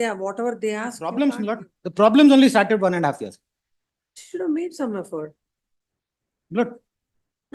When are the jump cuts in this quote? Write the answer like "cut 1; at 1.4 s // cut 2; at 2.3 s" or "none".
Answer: cut 1; at 1.0 s